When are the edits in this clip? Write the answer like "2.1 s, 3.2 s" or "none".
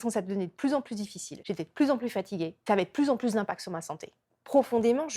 4.2 s